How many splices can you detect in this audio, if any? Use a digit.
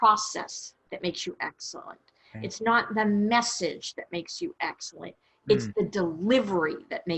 0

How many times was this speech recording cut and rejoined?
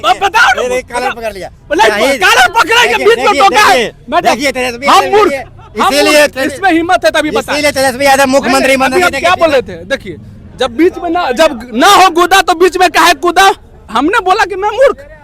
1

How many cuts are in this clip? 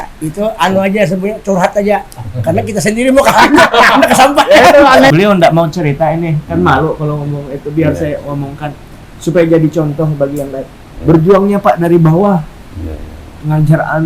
1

